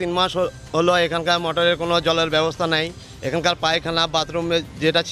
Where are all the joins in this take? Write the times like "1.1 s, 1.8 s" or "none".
none

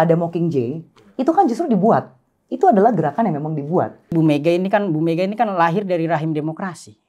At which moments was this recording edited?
4.1 s

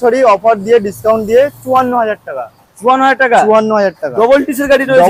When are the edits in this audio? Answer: none

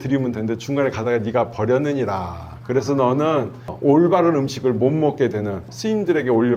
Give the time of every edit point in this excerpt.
3.7 s, 5.7 s

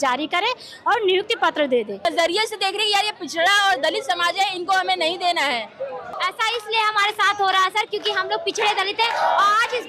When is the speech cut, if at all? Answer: 2.1 s, 6.0 s

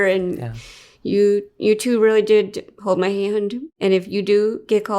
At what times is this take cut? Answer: 3.6 s

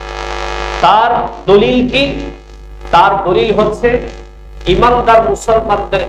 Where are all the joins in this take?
none

